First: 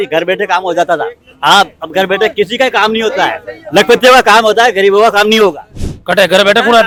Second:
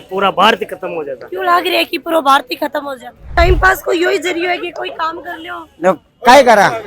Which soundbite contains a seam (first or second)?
second